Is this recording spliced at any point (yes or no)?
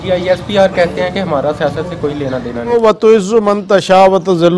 yes